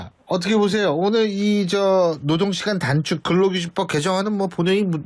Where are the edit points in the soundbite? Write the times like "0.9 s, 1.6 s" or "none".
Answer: 2.3 s